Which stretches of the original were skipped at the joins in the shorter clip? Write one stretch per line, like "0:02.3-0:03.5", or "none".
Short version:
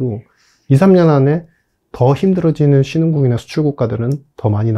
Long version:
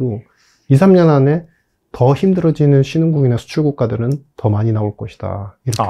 none